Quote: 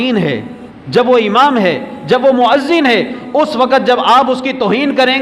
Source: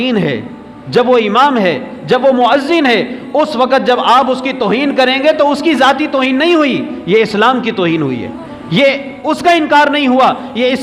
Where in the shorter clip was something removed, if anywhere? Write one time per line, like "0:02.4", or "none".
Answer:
none